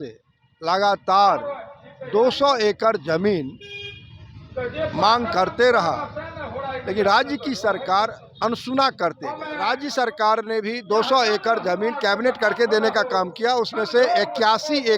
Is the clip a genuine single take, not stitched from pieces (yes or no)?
no